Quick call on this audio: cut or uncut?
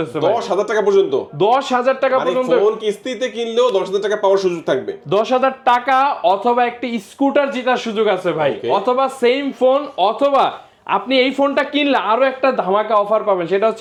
uncut